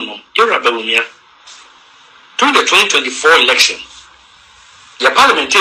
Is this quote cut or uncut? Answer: uncut